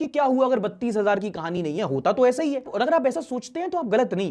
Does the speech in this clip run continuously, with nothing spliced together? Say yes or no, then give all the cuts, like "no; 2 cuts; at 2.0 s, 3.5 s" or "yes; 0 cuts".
yes; 0 cuts